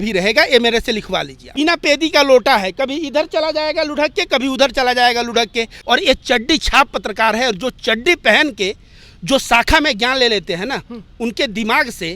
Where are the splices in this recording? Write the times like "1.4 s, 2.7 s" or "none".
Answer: 1.5 s, 5.7 s

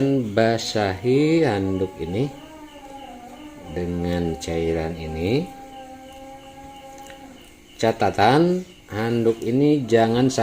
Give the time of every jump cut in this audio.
none

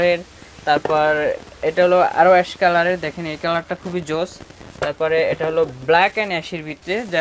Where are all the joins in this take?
none

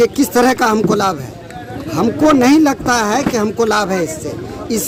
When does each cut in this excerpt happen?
none

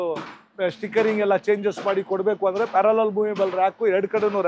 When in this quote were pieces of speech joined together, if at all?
none

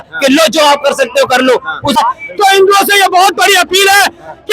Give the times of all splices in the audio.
2.0 s

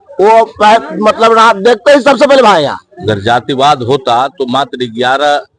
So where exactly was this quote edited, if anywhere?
2.9 s

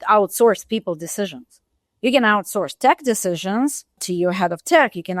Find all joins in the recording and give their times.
4.0 s

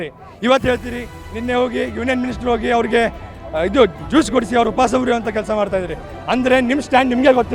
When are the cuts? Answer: none

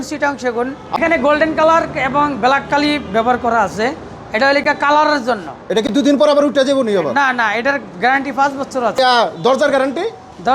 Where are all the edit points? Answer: 1.0 s, 9.0 s

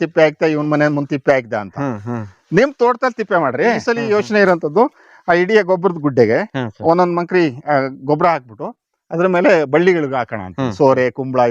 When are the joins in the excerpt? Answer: 4.0 s

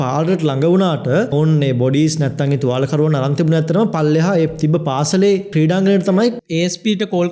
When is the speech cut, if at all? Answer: 1.3 s, 5.5 s, 6.4 s

